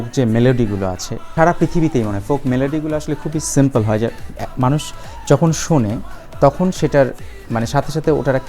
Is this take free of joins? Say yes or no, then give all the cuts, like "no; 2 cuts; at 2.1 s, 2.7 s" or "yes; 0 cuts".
no; 1 cut; at 1.3 s